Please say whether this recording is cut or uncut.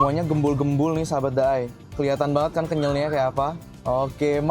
uncut